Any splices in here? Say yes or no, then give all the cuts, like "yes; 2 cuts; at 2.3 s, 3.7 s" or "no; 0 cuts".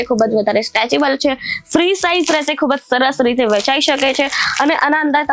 no; 0 cuts